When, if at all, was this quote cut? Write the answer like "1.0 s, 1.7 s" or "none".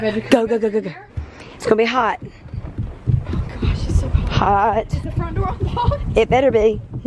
1.0 s

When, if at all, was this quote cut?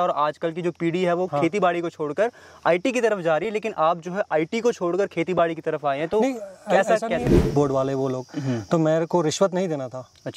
7.3 s

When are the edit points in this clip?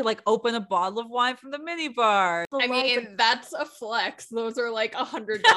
2.5 s

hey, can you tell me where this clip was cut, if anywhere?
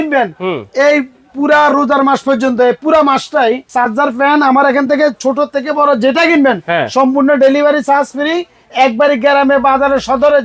3.7 s

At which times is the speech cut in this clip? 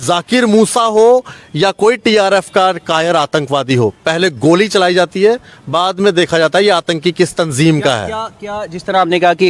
none

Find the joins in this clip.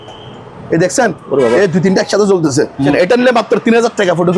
2.9 s

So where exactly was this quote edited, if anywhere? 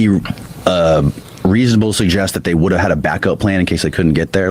1.3 s

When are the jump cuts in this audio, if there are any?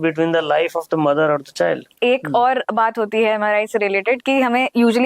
1.9 s

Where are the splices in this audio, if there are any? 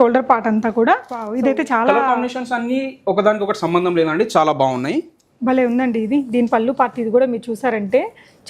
1.3 s

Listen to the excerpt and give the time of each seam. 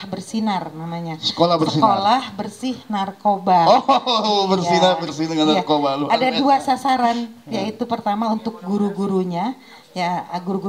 none

